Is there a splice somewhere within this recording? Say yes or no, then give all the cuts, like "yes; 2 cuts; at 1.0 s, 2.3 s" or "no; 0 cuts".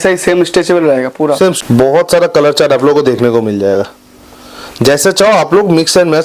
yes; 1 cut; at 1.4 s